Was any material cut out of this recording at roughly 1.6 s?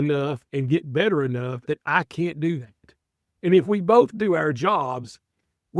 yes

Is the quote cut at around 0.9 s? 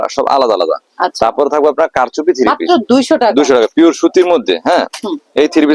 no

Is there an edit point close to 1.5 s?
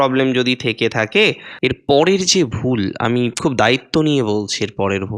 yes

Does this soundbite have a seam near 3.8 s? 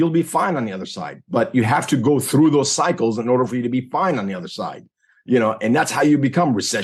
no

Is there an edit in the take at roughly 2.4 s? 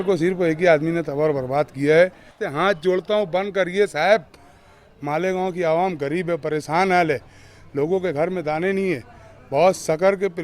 yes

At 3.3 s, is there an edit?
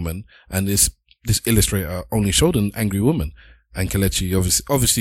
no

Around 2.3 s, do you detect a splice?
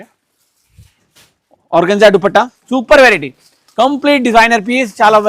yes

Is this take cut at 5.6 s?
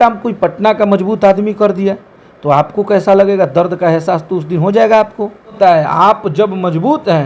yes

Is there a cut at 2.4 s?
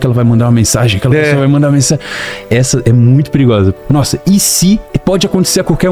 no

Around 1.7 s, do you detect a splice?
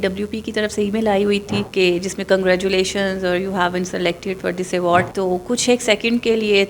yes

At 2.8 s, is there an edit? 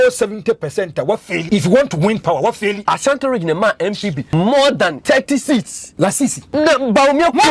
yes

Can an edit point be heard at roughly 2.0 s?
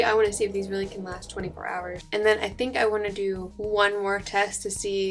yes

